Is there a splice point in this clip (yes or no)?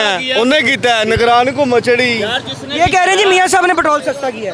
no